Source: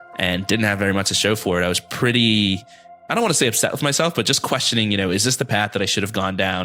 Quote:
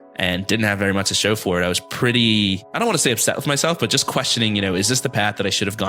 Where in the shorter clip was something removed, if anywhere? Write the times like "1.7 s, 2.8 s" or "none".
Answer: 2.7 s